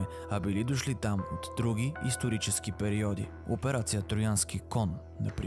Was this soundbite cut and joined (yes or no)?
yes